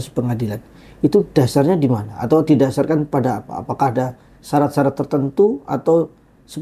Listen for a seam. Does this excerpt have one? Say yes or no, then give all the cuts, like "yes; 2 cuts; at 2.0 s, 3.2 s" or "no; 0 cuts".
no; 0 cuts